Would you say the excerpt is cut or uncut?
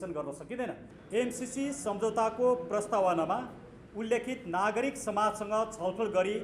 cut